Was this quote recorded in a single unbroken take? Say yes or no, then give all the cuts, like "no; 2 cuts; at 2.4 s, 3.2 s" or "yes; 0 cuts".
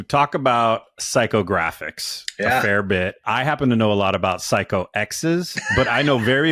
no; 1 cut; at 3.2 s